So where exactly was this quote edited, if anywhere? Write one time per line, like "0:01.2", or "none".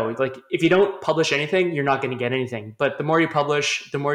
none